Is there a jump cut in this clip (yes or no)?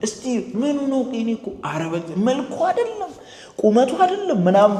no